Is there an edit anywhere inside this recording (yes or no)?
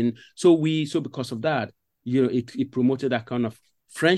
no